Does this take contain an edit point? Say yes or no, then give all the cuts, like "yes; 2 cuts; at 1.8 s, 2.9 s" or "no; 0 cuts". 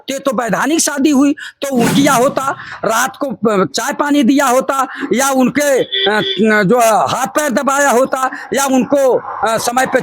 yes; 1 cut; at 1.9 s